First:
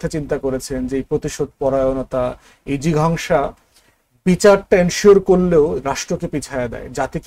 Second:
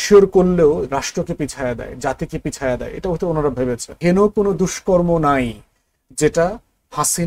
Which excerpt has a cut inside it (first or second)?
second